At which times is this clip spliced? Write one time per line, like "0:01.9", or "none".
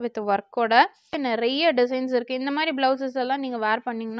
0:01.1